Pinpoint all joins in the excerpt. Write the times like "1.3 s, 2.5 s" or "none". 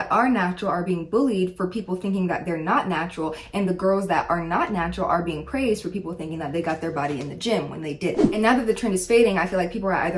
8.3 s